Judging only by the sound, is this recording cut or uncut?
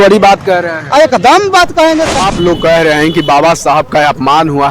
cut